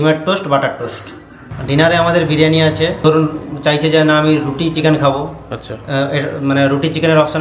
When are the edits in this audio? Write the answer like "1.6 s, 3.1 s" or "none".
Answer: 1.3 s, 3.0 s

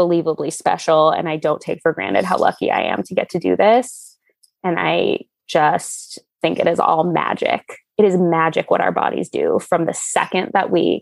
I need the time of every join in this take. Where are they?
none

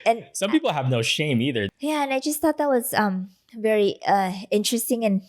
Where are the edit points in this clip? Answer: 1.7 s

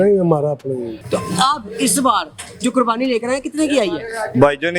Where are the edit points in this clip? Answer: 1.0 s

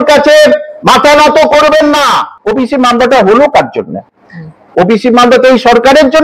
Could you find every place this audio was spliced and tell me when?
2.4 s

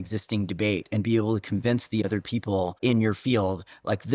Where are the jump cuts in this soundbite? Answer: 2.8 s

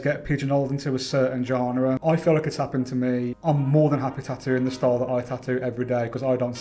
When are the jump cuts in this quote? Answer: 2.0 s, 3.4 s

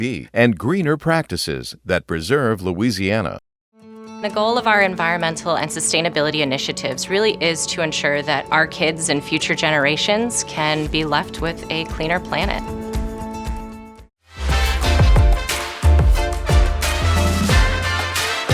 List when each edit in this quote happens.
none

